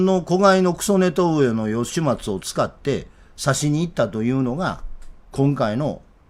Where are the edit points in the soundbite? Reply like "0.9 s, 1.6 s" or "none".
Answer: none